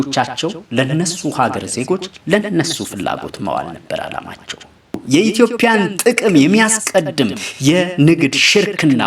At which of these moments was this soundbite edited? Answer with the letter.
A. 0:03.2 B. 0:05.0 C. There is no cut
B